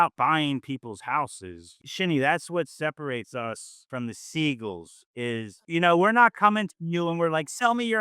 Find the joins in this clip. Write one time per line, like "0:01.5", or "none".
0:01.8

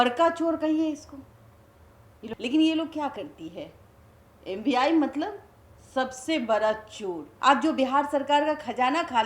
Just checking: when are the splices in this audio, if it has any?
0:02.2
0:07.3

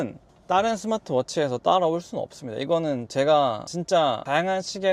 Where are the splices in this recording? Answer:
none

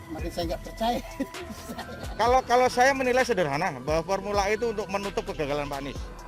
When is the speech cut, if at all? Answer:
0:02.0

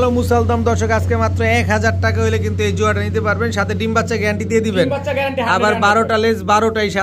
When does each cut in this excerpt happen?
none

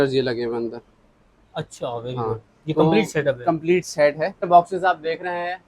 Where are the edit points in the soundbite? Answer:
0:04.5

